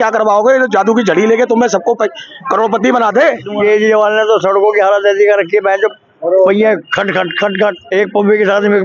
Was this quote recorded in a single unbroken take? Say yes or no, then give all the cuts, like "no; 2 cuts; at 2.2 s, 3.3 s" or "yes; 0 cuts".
no; 2 cuts; at 3.5 s, 7.8 s